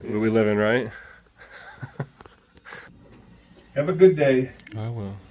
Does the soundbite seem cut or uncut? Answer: cut